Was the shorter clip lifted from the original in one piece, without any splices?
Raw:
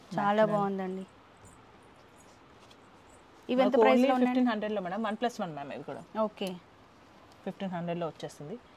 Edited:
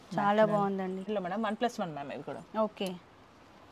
no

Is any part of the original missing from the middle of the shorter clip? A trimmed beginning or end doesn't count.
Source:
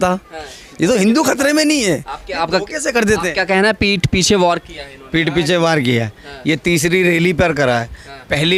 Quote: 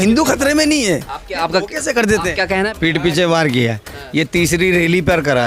yes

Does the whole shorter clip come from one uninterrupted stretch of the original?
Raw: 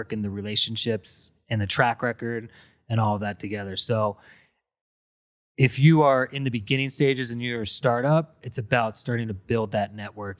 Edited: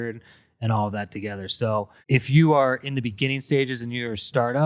no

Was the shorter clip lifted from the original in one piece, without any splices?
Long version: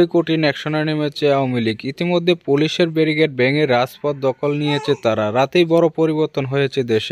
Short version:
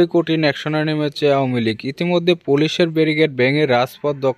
yes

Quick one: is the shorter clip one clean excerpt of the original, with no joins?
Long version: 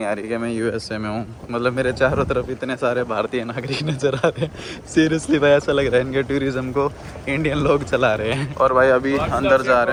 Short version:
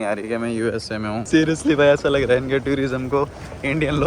no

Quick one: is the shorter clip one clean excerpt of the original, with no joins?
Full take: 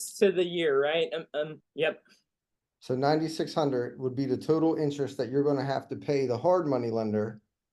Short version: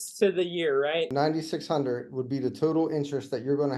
no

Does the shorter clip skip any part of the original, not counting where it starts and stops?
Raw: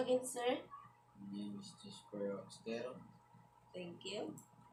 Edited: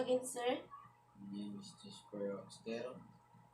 no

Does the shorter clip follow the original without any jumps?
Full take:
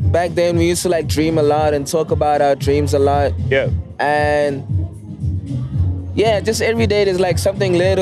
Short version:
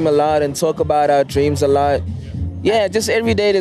no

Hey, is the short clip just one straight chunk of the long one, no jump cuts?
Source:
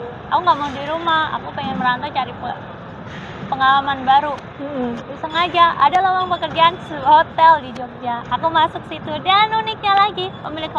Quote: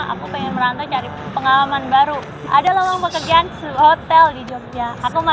no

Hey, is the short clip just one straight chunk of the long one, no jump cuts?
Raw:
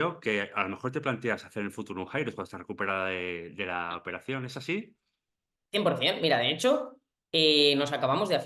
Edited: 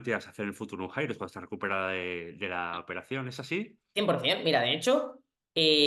no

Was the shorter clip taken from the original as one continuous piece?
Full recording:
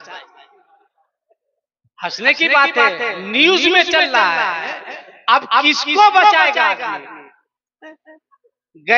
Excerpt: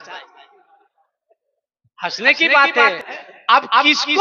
no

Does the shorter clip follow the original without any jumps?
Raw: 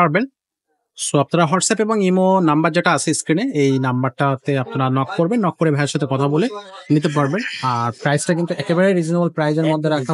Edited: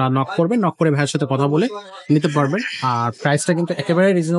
yes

